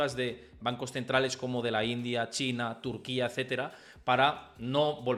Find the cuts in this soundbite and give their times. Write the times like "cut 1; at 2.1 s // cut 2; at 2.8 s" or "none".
none